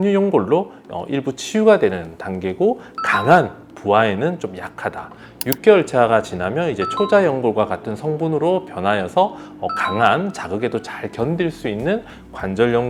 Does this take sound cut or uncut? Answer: uncut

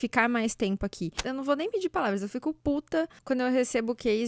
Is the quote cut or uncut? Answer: cut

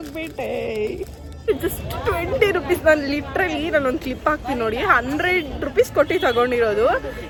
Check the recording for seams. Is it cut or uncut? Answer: uncut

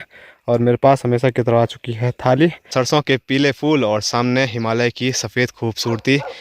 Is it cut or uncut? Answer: cut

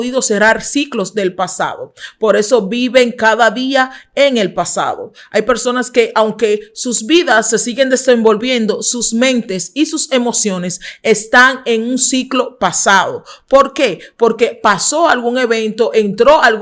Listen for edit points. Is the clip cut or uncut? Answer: uncut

